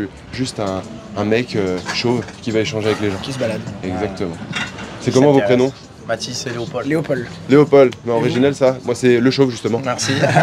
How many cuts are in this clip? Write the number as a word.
zero